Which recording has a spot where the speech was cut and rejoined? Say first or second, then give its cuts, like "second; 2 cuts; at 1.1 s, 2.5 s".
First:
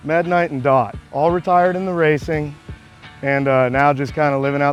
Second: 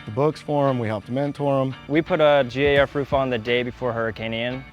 second; 1 cut; at 1.8 s